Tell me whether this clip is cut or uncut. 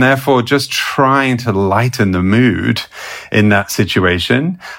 uncut